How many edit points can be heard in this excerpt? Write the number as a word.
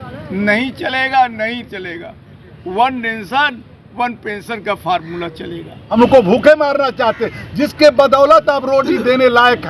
one